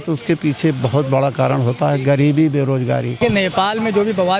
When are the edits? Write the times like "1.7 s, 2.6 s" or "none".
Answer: none